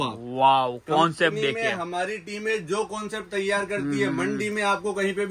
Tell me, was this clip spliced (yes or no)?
no